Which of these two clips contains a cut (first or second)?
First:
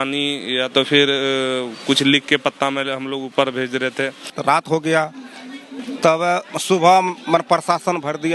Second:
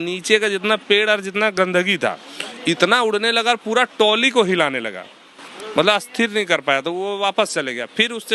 first